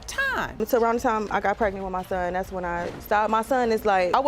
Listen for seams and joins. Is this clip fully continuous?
yes; 0 cuts

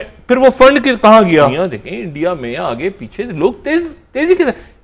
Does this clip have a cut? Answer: yes; 1 cut; at 1.5 s

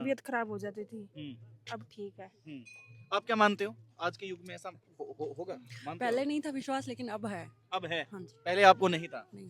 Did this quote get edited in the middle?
no; 0 cuts

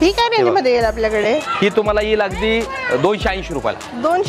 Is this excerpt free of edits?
yes; 0 cuts

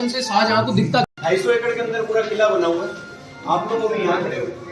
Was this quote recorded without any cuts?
no; 1 cut; at 1.1 s

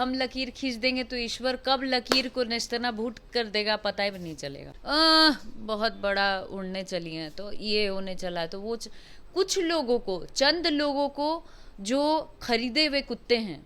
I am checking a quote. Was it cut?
yes; 1 cut; at 4.7 s

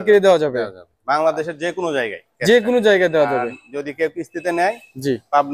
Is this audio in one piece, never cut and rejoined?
yes; 0 cuts

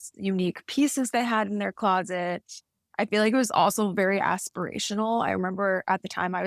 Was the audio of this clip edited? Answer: no; 0 cuts

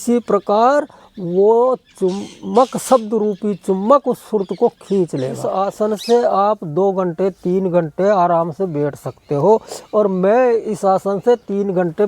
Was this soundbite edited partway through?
yes; 1 cut; at 5.5 s

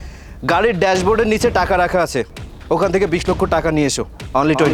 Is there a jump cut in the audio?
no; 0 cuts

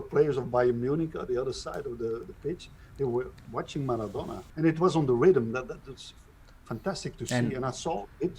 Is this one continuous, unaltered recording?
no; 1 cut; at 4.4 s

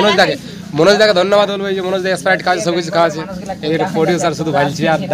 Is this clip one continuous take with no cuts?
yes; 0 cuts

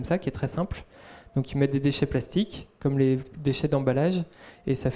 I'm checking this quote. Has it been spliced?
no; 0 cuts

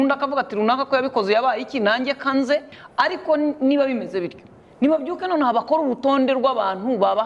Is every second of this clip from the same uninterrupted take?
no; 1 cut; at 2.8 s

